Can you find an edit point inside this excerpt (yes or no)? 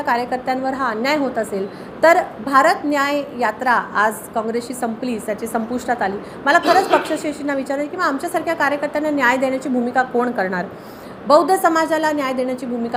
no